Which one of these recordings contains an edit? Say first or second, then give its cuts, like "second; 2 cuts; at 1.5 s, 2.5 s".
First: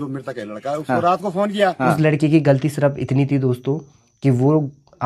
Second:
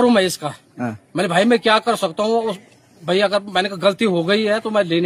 first; 1 cut; at 2.0 s